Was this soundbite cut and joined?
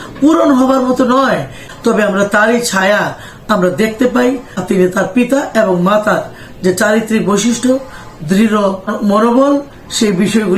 yes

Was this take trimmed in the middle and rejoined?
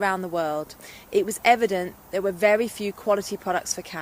no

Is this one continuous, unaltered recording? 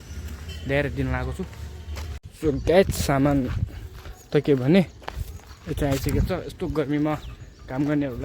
no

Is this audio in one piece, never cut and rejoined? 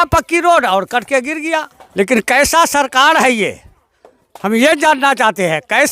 no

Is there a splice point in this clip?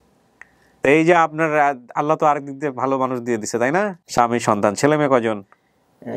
no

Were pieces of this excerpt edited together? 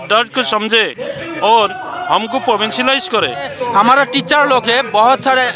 yes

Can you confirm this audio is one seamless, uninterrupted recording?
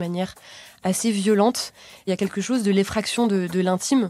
yes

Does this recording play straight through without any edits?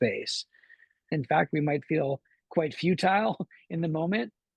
no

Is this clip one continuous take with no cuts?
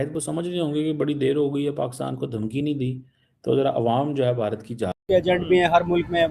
no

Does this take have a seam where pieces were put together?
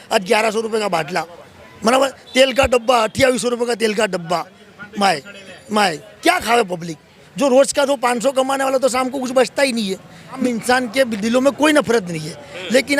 yes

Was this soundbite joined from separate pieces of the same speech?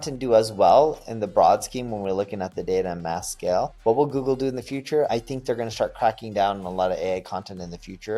yes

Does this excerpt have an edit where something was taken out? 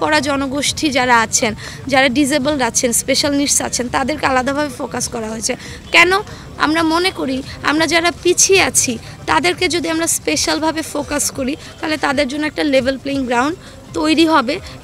no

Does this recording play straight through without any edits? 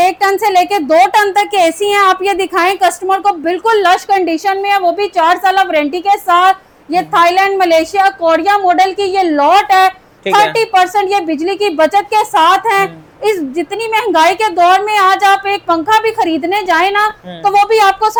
yes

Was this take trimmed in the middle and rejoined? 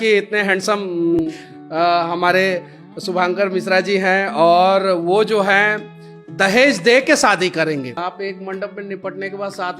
yes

